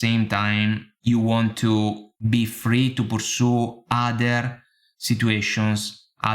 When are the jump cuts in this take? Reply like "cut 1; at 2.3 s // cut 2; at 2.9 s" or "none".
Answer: cut 1; at 0.9 s // cut 2; at 2.1 s